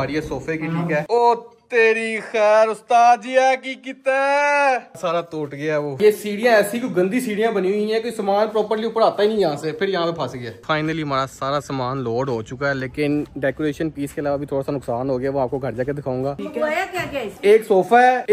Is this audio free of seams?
no; 5 cuts; at 1.1 s, 6.0 s, 10.5 s, 16.4 s, 17.3 s

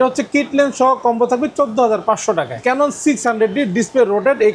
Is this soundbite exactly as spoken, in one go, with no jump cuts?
no; 1 cut; at 2.5 s

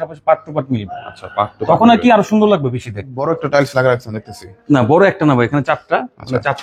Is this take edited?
yes; 1 cut; at 3.1 s

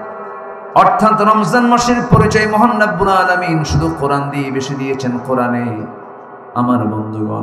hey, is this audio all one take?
yes; 0 cuts

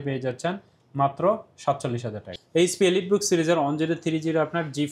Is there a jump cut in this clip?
yes; 1 cut; at 2.3 s

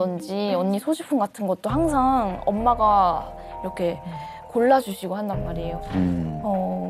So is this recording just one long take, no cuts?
yes; 0 cuts

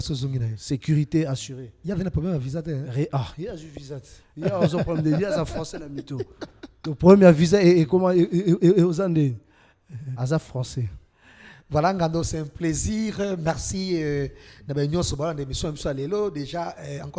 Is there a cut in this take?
no; 0 cuts

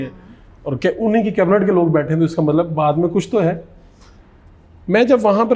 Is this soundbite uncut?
yes; 0 cuts

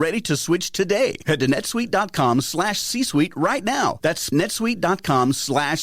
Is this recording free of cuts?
no; 1 cut; at 4.3 s

